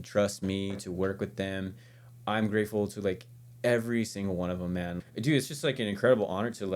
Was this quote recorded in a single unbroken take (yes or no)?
no